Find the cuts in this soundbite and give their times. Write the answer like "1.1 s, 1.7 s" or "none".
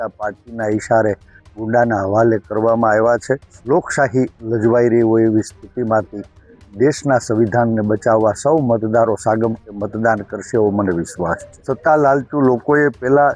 3.5 s, 11.5 s